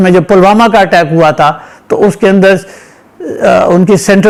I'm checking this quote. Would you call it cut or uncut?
uncut